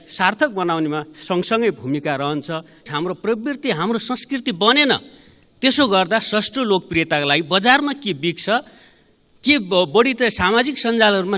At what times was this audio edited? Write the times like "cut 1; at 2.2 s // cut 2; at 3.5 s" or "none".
cut 1; at 2.9 s